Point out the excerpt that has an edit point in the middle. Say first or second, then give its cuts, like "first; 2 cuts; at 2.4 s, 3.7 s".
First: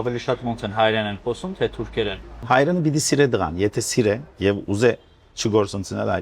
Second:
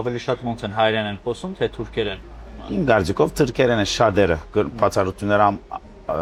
first; 1 cut; at 2.3 s